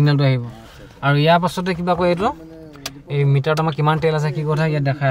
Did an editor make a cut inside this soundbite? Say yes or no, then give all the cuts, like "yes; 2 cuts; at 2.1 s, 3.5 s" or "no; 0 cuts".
no; 0 cuts